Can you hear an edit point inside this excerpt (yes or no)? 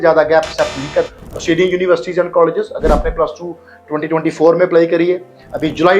no